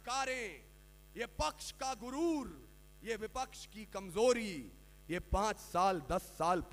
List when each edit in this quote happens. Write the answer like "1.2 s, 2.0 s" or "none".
none